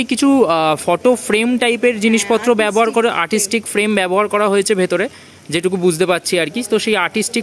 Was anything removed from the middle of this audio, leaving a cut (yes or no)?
no